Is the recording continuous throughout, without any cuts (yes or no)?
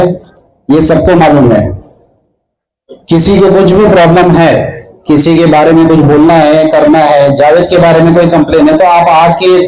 yes